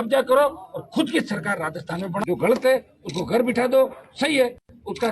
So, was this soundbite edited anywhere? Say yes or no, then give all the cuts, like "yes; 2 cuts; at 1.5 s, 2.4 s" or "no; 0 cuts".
yes; 1 cut; at 2.2 s